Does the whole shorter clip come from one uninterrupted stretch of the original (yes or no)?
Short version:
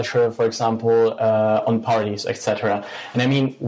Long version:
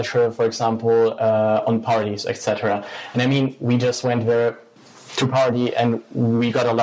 yes